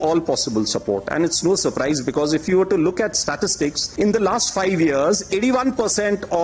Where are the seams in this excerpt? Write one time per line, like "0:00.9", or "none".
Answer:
none